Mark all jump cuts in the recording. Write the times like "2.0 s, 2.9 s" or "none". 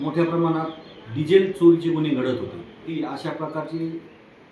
2.9 s